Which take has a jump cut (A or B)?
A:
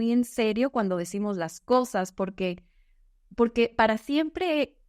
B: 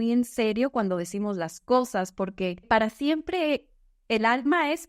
B